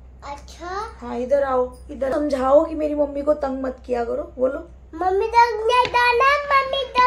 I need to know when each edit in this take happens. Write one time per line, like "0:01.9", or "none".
0:02.1